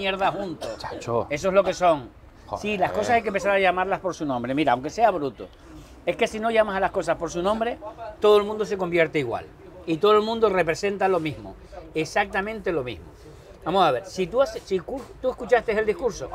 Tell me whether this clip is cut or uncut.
uncut